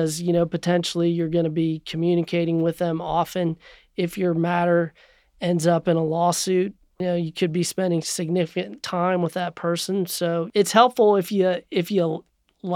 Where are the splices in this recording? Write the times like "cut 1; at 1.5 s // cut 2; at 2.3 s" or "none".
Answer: cut 1; at 7.0 s // cut 2; at 8.1 s // cut 3; at 10.5 s